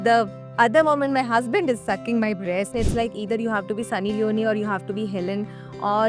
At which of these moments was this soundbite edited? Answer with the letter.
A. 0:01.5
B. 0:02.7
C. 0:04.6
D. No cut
B